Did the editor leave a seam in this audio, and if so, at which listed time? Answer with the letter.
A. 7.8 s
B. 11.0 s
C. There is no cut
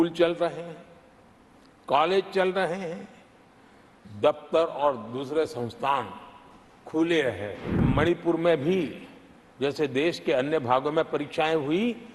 A